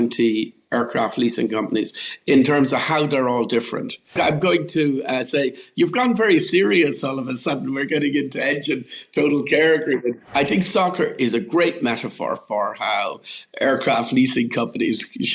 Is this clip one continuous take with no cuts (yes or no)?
no